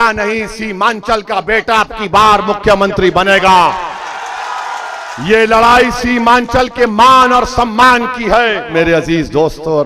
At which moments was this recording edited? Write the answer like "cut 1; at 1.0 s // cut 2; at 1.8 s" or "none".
cut 1; at 8.7 s